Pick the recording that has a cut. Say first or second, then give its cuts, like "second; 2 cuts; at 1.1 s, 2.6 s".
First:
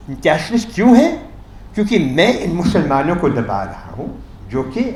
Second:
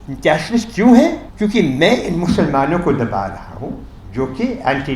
second; 1 cut; at 1.3 s